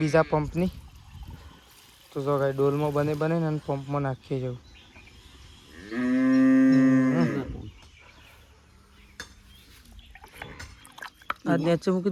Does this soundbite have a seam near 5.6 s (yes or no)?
no